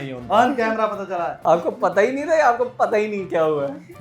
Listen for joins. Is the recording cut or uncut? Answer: cut